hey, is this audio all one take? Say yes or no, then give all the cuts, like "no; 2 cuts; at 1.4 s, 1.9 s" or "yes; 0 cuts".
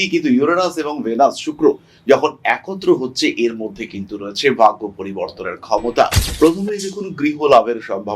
no; 1 cut; at 6.2 s